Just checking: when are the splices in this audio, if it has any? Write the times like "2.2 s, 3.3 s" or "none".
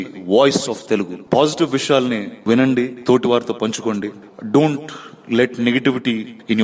none